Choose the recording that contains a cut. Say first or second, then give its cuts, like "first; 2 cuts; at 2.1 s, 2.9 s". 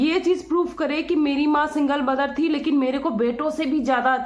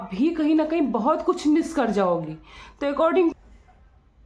second; 1 cut; at 3.3 s